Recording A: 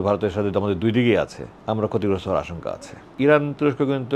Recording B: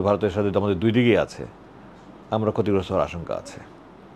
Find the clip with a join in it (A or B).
A